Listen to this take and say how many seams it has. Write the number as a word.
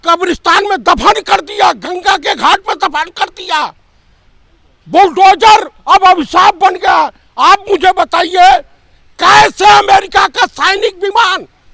zero